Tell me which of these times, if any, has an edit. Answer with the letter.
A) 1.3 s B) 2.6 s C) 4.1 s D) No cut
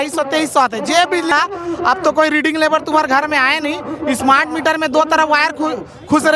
A